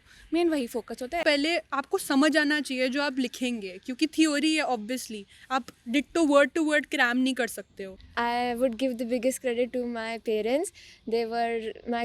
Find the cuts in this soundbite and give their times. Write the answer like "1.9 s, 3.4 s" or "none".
1.2 s, 8.0 s